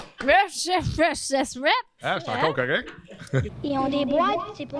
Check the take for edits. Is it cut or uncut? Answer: cut